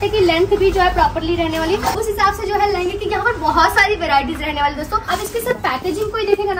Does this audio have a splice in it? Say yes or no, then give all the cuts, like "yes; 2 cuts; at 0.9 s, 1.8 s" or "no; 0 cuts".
yes; 2 cuts; at 2.0 s, 5.0 s